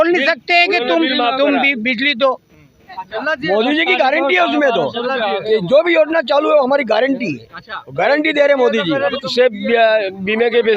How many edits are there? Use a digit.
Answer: 2